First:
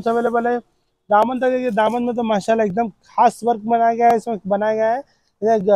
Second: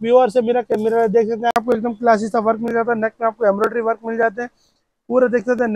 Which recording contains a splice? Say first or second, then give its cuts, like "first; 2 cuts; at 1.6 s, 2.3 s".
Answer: second; 1 cut; at 1.6 s